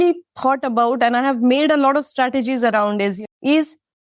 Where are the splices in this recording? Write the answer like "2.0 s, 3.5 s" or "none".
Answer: none